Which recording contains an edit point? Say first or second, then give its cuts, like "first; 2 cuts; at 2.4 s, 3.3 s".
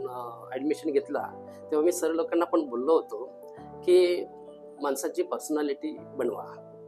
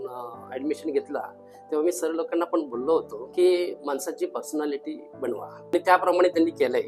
second; 3 cuts; at 3.2 s, 3.8 s, 5.7 s